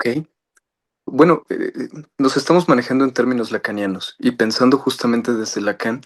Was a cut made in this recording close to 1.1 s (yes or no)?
yes